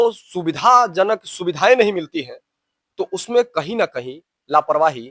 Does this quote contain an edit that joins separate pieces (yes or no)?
no